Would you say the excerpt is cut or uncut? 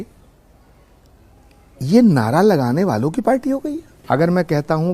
cut